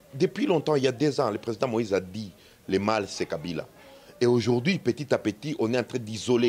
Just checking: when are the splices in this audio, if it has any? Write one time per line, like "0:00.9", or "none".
none